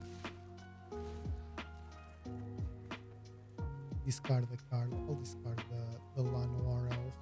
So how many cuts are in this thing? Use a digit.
2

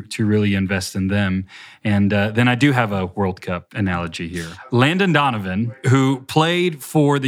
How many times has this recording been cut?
2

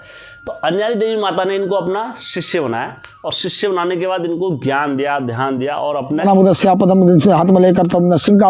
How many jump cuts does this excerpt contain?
1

